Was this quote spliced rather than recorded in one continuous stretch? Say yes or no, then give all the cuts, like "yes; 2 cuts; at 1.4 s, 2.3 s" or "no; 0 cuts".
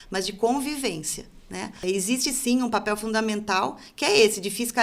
yes; 1 cut; at 1.8 s